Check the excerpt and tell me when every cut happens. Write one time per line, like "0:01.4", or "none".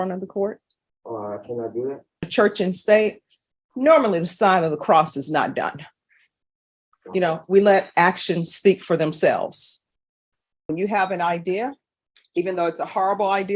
0:02.3
0:10.7